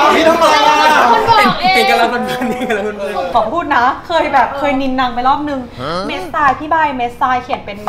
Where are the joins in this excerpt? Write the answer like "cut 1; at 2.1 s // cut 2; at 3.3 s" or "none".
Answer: cut 1; at 3.3 s